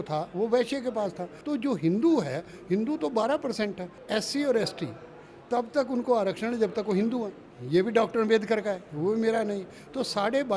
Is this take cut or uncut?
cut